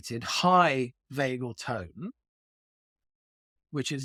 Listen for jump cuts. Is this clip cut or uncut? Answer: uncut